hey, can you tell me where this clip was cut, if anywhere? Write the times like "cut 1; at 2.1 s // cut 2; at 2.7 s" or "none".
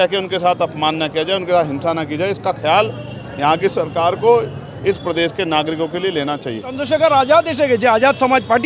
cut 1; at 6.7 s